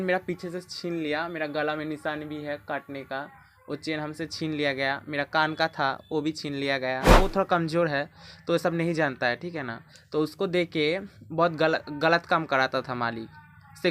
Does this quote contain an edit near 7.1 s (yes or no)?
yes